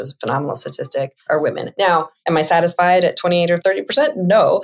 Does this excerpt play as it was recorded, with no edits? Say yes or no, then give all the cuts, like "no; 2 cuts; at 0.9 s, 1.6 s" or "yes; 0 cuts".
no; 3 cuts; at 1.2 s, 2.1 s, 3.6 s